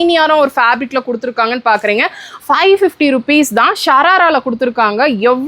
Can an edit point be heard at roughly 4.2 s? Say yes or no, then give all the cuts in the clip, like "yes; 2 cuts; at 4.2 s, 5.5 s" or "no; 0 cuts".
no; 1 cut; at 2.2 s